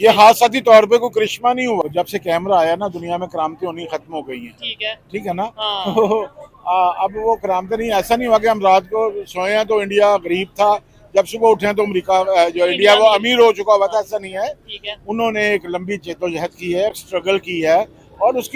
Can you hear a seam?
yes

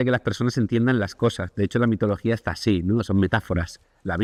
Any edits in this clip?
no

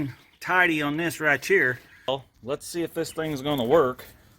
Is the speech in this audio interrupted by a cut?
yes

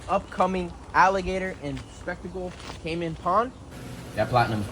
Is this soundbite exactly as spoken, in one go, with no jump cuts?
no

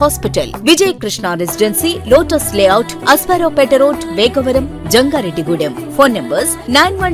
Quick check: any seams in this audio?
no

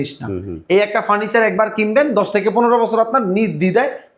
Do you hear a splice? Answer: no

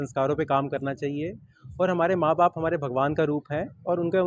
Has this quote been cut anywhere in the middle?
no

